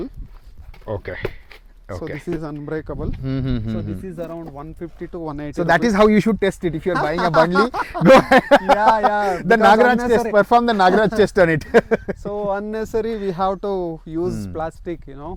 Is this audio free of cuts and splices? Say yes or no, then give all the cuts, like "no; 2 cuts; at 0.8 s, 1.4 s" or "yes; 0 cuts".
yes; 0 cuts